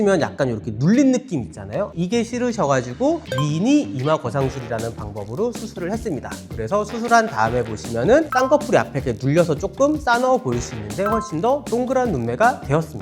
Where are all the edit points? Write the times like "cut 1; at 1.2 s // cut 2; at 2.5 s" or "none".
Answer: cut 1; at 1.9 s // cut 2; at 3.3 s // cut 3; at 8.3 s